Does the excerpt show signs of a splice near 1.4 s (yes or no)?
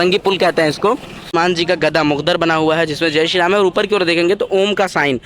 yes